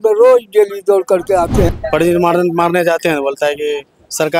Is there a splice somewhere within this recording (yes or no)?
yes